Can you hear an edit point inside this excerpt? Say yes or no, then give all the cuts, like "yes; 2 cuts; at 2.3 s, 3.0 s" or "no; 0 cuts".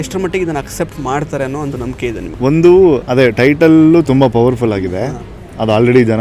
yes; 2 cuts; at 2.3 s, 3.0 s